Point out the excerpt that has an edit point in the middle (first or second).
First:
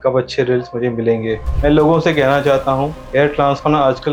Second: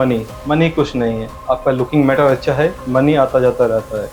first